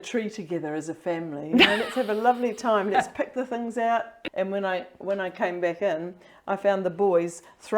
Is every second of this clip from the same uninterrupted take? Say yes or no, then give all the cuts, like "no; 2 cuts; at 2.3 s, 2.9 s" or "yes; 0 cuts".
no; 1 cut; at 4.2 s